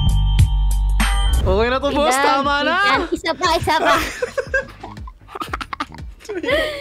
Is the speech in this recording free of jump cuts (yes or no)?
no